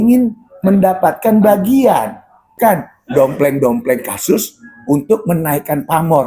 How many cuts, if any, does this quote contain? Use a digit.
1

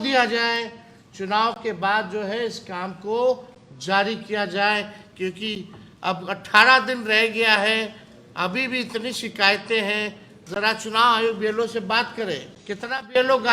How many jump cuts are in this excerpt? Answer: 1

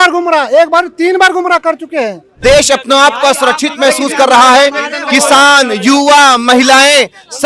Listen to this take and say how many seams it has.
1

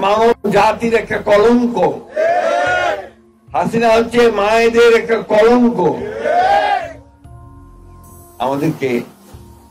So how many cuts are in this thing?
0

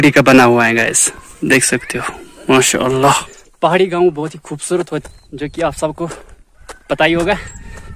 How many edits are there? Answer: 2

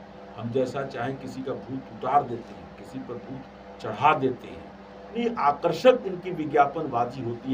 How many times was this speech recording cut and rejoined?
1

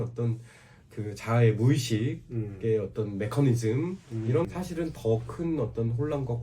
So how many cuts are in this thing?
1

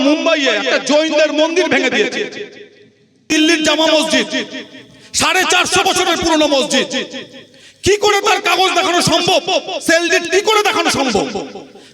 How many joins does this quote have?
1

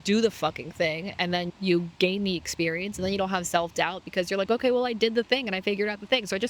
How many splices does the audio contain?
1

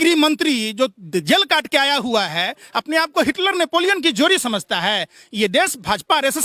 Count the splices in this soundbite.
0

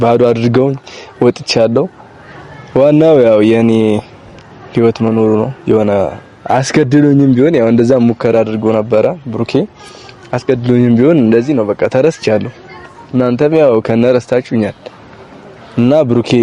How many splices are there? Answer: 0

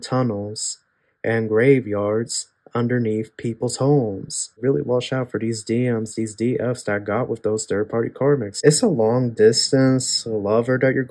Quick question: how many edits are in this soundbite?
2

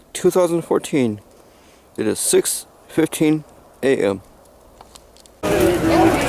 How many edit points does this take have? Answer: 1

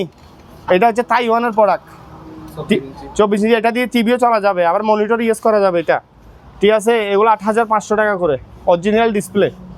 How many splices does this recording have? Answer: 0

